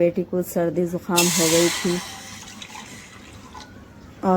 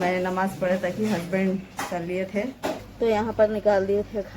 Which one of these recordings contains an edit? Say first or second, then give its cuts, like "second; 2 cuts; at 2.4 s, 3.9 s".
second; 1 cut; at 2.8 s